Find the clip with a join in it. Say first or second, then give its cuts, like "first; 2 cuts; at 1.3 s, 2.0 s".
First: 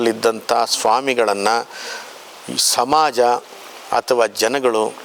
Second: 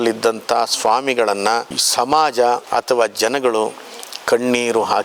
second; 2 cuts; at 1.8 s, 2.6 s